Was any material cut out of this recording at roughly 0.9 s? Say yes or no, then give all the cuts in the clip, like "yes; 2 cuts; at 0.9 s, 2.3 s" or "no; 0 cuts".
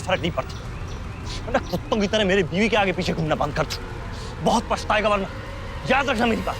no; 0 cuts